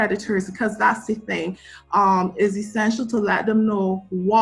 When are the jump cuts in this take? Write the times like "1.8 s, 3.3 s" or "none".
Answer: none